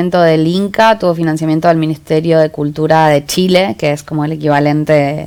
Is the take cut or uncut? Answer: uncut